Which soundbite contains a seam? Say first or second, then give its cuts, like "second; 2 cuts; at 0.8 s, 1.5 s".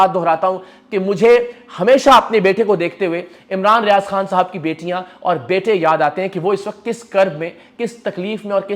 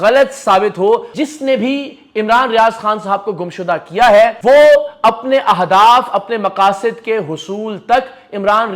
second; 2 cuts; at 1.1 s, 4.4 s